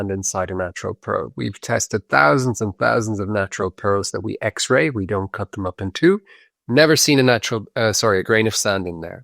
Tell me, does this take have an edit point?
no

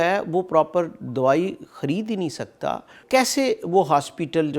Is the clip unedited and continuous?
no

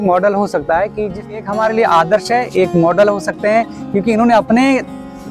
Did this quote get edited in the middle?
yes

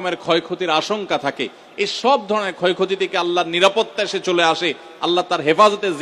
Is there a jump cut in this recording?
no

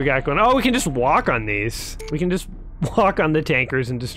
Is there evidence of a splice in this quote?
no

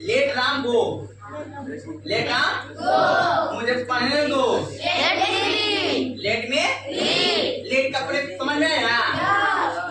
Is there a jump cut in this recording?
no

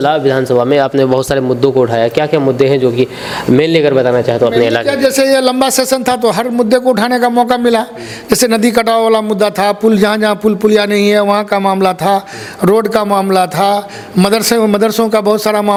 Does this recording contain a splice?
no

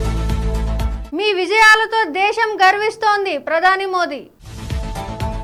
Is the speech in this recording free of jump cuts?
yes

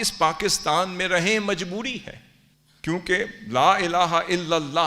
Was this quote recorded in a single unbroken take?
yes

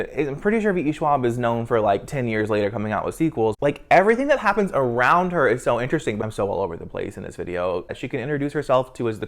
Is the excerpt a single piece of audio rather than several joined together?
no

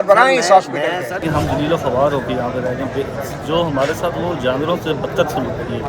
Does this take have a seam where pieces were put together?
yes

